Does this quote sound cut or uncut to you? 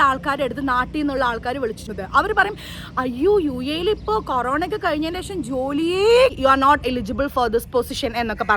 cut